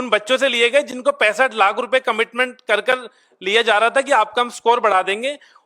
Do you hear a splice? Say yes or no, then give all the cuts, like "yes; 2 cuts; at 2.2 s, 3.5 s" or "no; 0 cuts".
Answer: no; 0 cuts